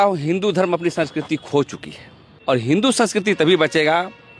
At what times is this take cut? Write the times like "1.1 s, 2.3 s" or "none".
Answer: none